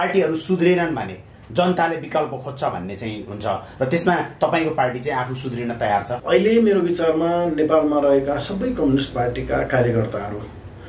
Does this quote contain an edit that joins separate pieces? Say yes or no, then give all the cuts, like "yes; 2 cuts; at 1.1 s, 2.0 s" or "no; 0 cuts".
yes; 1 cut; at 6.2 s